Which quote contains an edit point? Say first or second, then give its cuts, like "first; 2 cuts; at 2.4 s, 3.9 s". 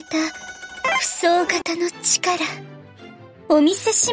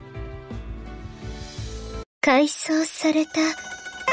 second; 1 cut; at 2.1 s